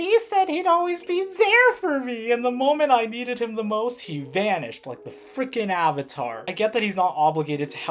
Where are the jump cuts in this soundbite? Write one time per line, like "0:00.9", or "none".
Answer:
none